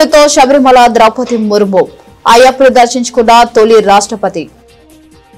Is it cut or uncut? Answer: uncut